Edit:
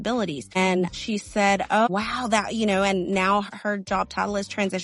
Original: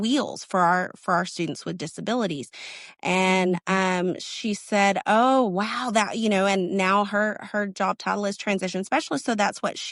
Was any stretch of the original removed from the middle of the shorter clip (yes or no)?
yes